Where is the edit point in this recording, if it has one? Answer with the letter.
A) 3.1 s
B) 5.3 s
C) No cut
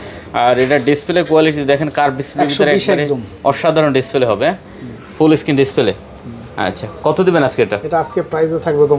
C